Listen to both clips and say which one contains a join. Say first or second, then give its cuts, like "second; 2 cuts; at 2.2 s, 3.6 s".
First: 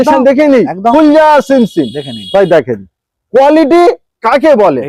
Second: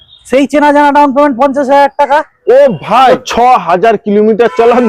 second; 1 cut; at 3.2 s